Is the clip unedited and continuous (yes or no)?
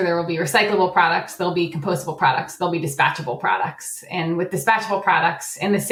yes